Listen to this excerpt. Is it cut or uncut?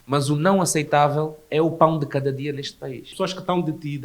cut